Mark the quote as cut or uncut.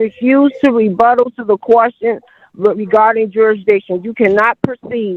uncut